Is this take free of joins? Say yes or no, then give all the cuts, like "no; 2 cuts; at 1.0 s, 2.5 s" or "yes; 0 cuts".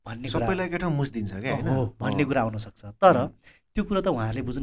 yes; 0 cuts